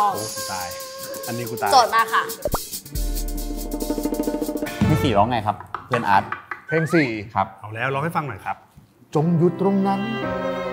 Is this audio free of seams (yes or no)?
no